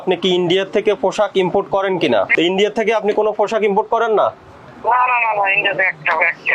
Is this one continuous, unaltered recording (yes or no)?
yes